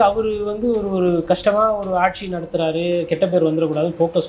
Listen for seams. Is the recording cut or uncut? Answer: uncut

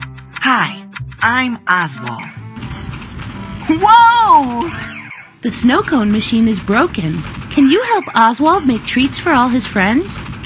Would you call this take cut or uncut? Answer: uncut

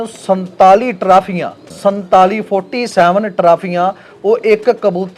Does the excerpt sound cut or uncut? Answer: cut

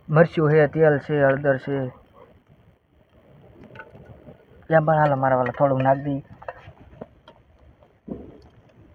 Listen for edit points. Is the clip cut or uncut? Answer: uncut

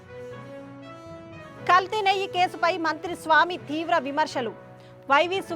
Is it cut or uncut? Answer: cut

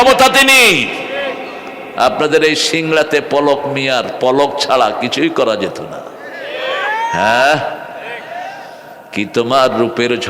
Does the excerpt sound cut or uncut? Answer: uncut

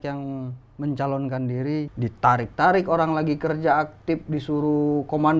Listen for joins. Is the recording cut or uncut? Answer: cut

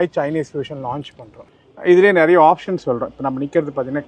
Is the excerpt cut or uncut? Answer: cut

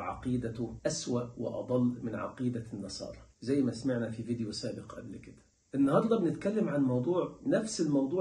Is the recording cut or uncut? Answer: uncut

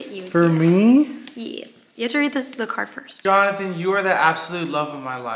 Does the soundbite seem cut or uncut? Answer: uncut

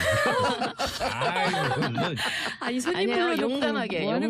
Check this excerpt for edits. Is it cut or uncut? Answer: cut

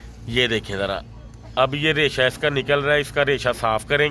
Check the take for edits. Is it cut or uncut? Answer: uncut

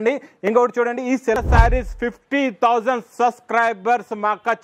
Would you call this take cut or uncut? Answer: cut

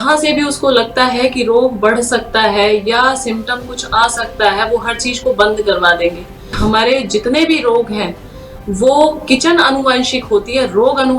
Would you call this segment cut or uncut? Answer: cut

